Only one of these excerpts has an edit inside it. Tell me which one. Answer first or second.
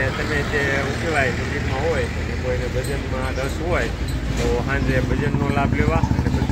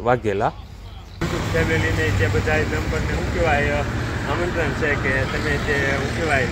second